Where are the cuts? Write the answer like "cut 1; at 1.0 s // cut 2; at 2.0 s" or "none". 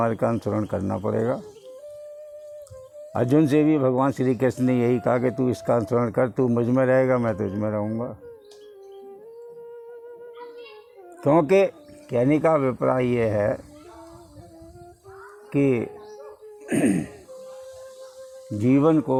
none